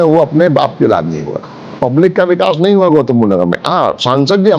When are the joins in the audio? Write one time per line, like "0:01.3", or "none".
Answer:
0:01.8